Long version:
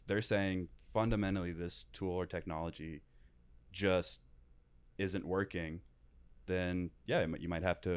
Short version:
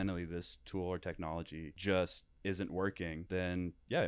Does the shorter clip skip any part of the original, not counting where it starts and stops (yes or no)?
yes